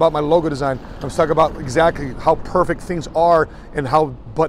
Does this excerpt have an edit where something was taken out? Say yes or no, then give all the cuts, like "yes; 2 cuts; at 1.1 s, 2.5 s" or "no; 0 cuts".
no; 0 cuts